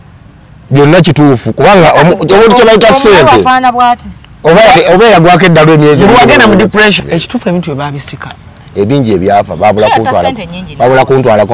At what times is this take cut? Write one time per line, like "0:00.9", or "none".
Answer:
0:07.0

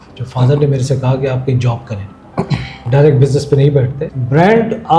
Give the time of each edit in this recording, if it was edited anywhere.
0:04.1

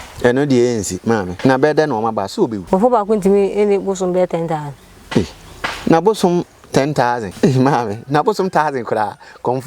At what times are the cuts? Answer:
0:01.3
0:02.6
0:07.3

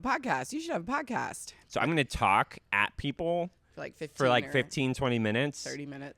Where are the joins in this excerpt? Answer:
0:01.5

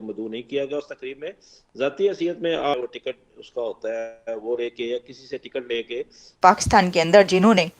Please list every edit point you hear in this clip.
0:02.7
0:06.3

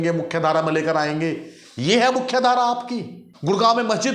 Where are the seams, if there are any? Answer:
0:03.2

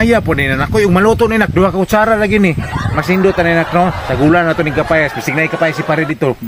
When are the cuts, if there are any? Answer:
none

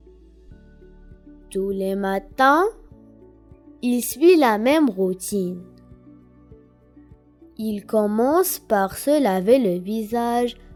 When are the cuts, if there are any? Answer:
none

